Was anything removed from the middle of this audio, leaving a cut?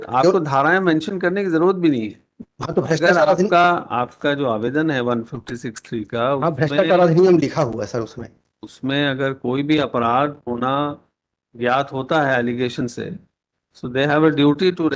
no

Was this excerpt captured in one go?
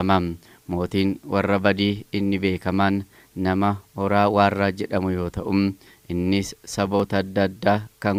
yes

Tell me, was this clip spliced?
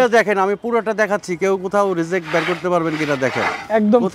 no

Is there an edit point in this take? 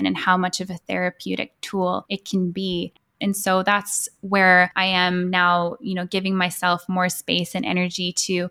yes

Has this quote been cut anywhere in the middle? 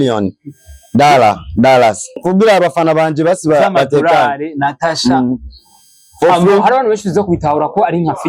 yes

